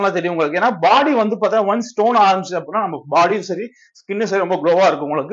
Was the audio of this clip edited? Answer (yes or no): no